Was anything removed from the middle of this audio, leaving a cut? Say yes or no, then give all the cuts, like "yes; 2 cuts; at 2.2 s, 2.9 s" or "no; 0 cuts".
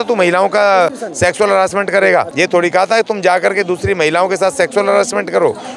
yes; 1 cut; at 2.3 s